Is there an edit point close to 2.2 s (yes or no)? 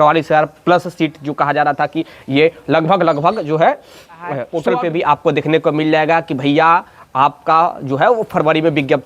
no